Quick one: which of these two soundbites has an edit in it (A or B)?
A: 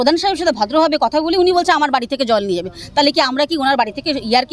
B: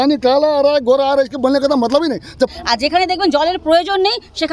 B